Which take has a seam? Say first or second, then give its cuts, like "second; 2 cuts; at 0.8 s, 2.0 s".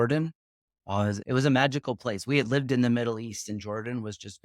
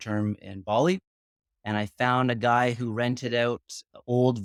first; 1 cut; at 1.2 s